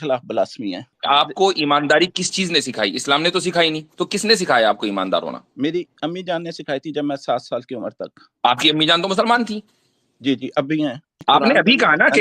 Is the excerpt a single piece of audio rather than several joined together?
no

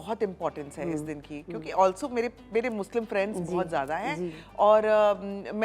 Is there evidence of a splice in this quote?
no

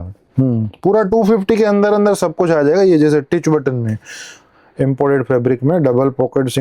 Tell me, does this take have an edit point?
no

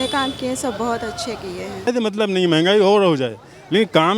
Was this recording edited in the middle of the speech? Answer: yes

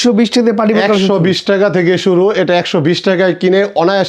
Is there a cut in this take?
no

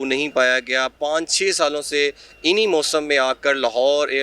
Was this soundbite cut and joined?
no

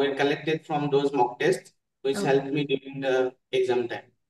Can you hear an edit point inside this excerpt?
no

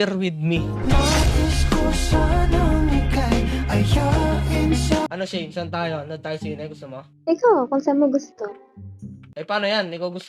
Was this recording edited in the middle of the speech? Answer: yes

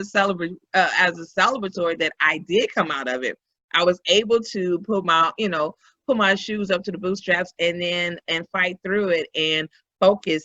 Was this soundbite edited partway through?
no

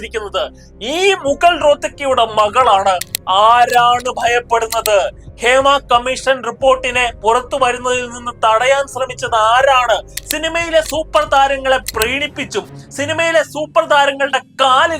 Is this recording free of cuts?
no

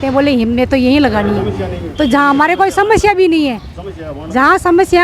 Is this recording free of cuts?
yes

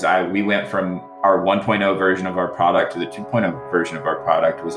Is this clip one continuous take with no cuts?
no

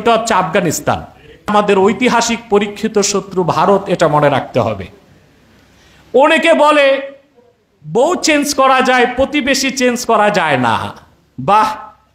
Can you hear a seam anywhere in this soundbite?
yes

